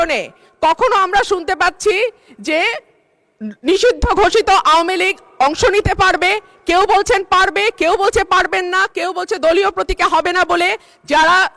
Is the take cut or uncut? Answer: uncut